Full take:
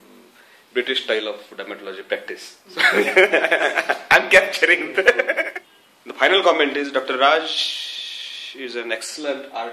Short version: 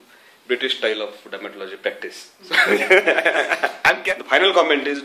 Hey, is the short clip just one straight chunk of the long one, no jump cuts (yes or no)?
no